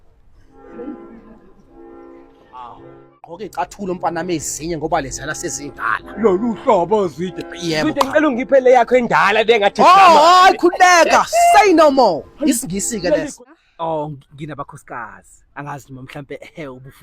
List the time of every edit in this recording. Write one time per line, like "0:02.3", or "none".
0:03.4
0:13.3